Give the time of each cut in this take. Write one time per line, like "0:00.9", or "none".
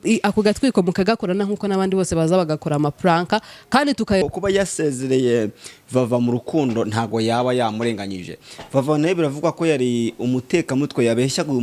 0:04.2